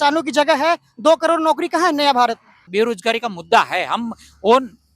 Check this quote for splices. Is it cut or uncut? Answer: cut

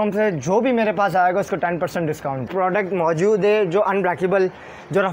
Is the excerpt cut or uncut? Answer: cut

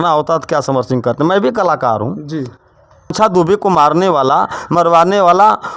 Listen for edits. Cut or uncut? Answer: cut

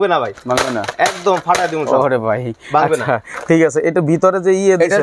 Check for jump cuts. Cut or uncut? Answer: uncut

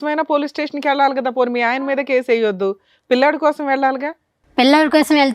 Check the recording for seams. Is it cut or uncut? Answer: uncut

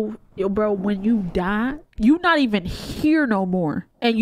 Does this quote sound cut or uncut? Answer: cut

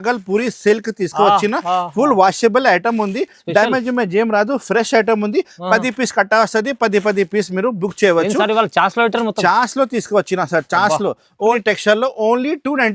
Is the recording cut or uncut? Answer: cut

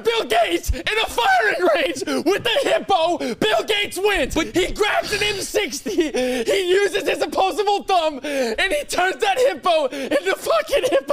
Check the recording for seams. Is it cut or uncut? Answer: uncut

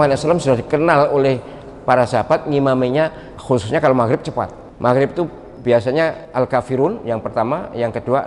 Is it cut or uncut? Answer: cut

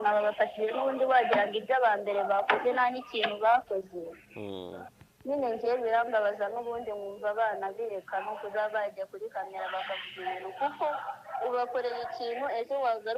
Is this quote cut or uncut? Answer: uncut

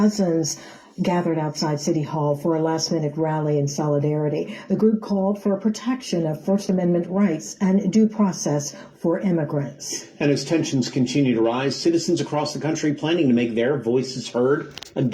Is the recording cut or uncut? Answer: cut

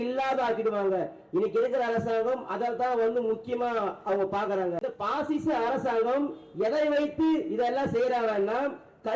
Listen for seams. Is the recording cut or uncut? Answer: cut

